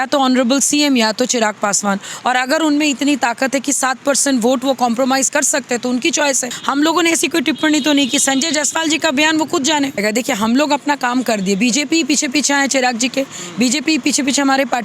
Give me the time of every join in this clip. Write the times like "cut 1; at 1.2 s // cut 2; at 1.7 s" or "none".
cut 1; at 6.5 s // cut 2; at 10.0 s